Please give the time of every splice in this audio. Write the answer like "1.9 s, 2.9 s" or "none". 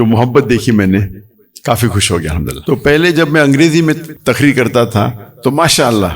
2.6 s, 4.1 s